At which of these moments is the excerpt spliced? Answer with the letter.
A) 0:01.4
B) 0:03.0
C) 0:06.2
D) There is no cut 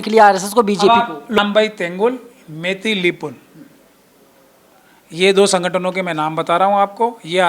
A